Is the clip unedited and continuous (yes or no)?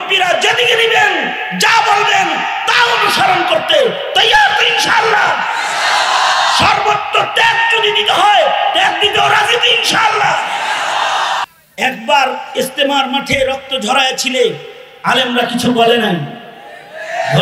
no